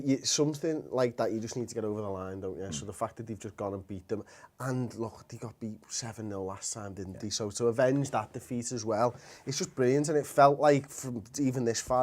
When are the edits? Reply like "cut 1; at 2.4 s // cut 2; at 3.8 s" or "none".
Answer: cut 1; at 8.8 s